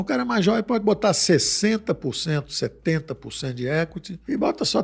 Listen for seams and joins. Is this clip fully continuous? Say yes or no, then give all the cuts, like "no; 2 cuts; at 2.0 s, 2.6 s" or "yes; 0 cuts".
yes; 0 cuts